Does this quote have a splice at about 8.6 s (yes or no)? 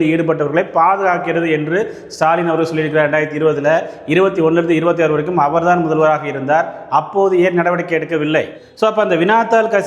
yes